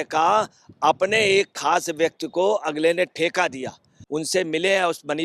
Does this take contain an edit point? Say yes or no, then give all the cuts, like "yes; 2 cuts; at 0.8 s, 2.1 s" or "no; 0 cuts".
yes; 1 cut; at 4.0 s